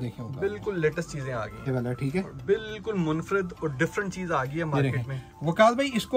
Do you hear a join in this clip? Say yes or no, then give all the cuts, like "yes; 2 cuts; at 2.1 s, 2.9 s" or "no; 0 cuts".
yes; 1 cut; at 1.6 s